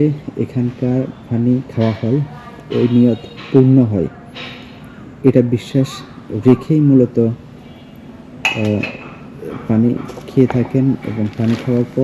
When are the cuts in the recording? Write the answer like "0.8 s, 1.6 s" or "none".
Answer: none